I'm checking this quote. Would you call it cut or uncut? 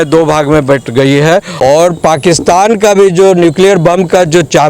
cut